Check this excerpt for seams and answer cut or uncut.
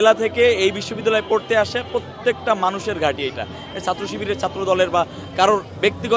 uncut